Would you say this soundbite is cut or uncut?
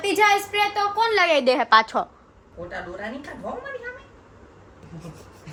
uncut